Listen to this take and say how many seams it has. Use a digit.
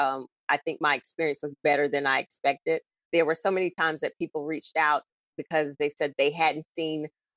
1